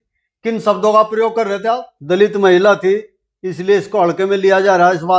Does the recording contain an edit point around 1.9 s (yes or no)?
yes